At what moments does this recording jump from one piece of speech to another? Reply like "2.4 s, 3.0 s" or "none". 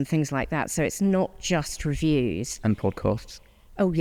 none